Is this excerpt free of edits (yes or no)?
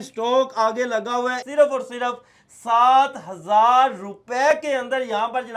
no